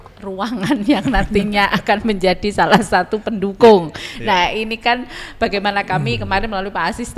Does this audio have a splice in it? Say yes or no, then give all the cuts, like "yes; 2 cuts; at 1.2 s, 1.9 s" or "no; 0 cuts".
no; 0 cuts